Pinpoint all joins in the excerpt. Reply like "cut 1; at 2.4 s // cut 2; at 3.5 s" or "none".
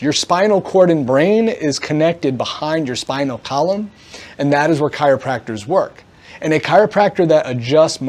none